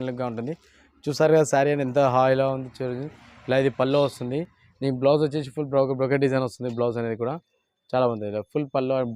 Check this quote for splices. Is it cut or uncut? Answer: uncut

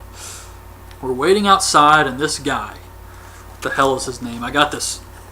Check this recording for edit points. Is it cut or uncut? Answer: cut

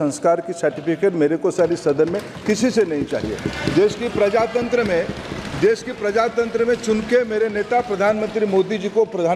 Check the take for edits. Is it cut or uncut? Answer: uncut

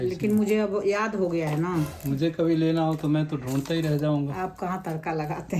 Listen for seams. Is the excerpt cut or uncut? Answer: cut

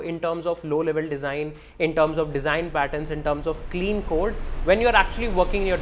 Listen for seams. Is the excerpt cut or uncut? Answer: uncut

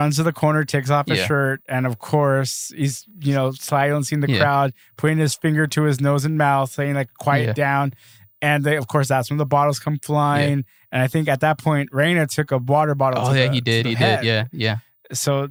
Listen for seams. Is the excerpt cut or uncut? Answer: uncut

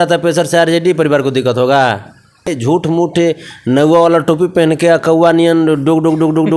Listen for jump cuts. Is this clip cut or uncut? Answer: cut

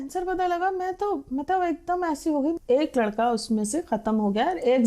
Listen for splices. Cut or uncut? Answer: cut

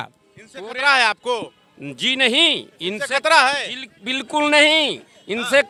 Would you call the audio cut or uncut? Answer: uncut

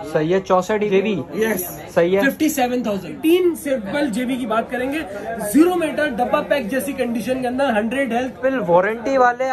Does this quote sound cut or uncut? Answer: cut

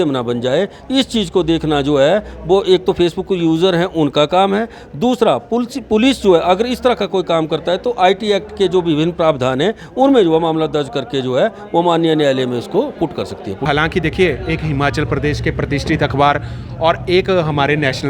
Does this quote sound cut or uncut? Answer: cut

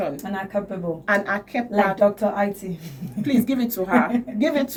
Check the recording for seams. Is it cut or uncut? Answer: uncut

